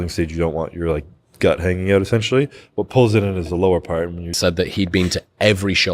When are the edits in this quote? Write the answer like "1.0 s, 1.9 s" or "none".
4.3 s